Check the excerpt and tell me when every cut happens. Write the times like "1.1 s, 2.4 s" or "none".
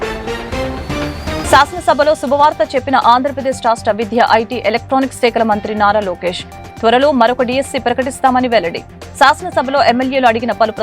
1.4 s